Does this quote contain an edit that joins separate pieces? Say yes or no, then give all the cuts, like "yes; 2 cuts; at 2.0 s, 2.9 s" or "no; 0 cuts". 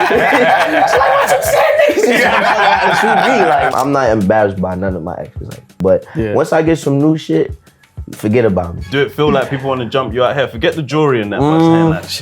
yes; 3 cuts; at 3.7 s, 5.7 s, 8.9 s